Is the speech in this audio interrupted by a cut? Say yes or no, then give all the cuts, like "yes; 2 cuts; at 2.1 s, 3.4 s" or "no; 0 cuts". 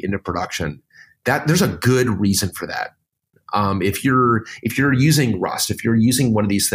yes; 1 cut; at 3.3 s